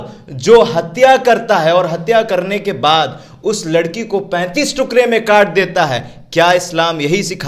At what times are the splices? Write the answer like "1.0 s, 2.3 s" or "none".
none